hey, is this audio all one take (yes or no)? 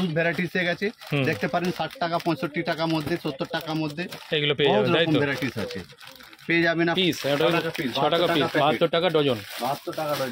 no